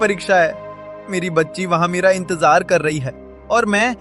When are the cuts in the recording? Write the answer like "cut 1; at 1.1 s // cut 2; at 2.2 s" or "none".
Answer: none